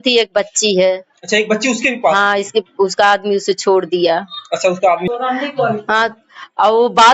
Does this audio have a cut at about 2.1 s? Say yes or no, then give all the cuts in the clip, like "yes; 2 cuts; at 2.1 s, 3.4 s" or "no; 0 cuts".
no; 1 cut; at 5.1 s